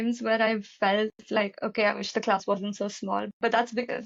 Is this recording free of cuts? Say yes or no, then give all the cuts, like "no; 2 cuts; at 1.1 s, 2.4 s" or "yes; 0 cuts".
yes; 0 cuts